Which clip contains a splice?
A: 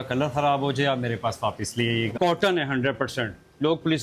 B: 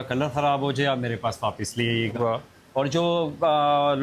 A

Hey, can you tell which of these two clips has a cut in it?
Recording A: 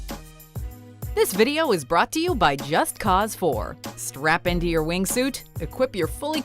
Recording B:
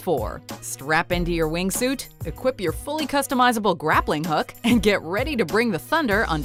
A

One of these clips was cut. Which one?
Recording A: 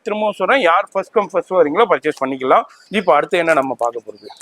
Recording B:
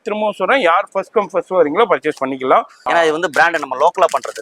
B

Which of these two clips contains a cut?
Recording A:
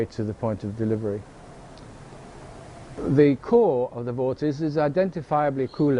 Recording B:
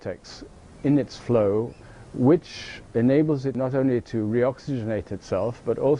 B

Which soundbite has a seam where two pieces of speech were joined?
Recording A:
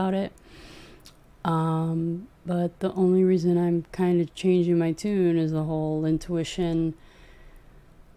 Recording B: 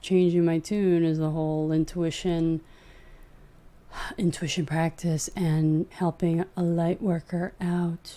B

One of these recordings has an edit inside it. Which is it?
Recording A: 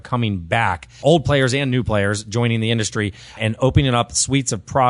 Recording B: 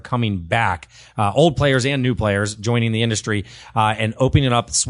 A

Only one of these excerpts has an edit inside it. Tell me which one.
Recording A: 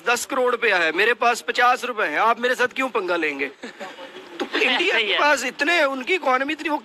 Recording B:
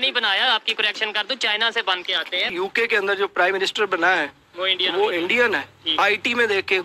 B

